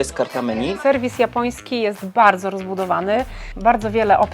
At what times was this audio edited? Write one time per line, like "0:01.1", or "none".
0:00.8
0:03.4

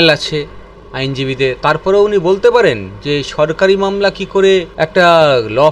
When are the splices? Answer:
0:01.6
0:04.8

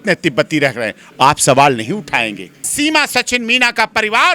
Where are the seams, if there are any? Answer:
0:02.6

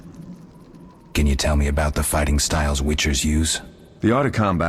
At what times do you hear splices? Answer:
0:01.0

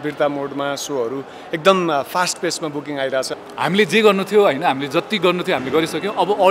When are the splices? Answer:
0:03.4

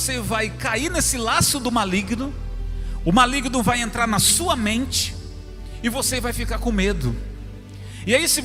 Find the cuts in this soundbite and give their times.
none

